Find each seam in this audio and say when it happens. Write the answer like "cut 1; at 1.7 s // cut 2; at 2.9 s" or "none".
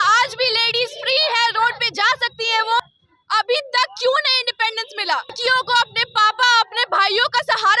cut 1; at 2.8 s // cut 2; at 5.3 s